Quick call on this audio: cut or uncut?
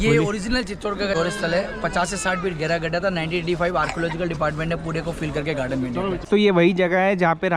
cut